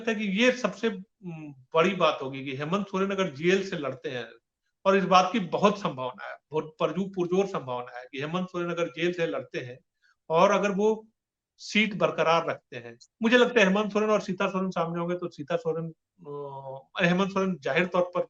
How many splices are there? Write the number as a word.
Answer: zero